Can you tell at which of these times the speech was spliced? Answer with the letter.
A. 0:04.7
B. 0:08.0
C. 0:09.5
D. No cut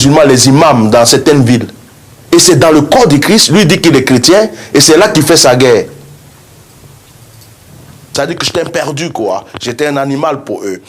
B